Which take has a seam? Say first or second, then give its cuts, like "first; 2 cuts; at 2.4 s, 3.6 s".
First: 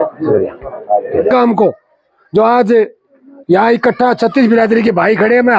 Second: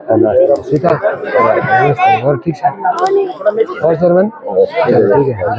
first; 1 cut; at 1.3 s